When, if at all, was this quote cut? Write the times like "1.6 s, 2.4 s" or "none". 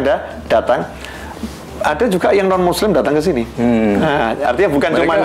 none